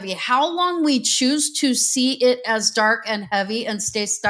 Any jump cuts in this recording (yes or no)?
no